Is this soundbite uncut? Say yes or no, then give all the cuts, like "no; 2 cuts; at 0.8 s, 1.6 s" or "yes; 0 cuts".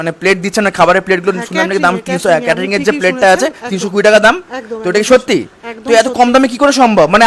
yes; 0 cuts